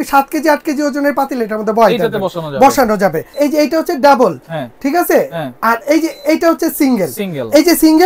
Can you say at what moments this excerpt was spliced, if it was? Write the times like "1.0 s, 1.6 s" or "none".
3.3 s